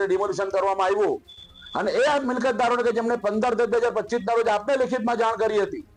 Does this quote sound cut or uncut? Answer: uncut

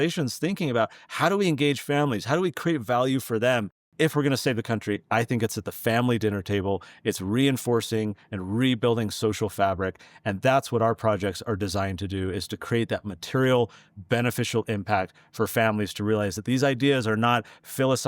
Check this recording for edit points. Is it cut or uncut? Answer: cut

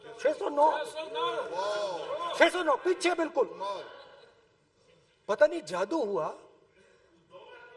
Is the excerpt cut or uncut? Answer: uncut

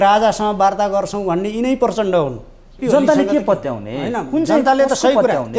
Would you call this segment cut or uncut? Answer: cut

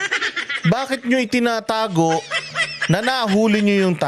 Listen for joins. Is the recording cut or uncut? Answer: uncut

